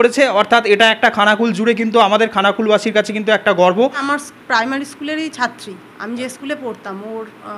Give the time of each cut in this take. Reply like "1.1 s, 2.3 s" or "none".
4.0 s